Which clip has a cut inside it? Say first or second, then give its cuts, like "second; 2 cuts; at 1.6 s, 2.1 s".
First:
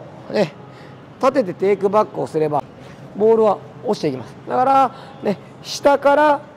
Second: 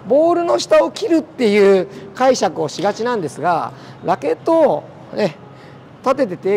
first; 1 cut; at 2.7 s